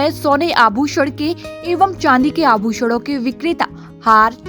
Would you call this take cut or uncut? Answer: uncut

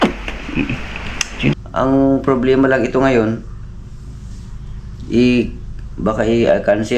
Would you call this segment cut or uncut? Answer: cut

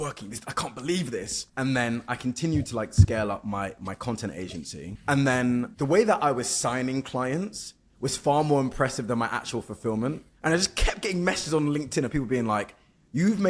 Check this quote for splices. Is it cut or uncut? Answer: cut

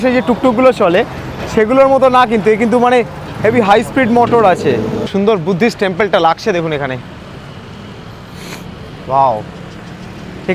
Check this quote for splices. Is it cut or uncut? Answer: uncut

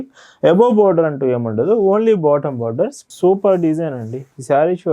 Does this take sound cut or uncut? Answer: cut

